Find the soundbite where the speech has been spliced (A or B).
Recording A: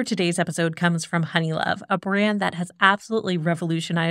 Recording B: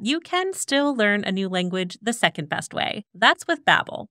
B